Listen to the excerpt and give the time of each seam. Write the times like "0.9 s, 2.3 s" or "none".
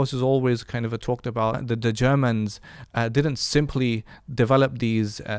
1.6 s